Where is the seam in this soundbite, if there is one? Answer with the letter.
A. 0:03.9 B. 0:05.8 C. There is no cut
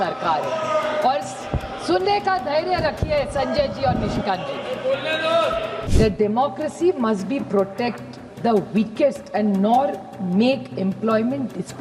B